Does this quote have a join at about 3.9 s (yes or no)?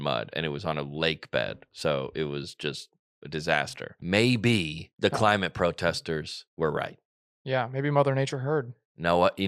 yes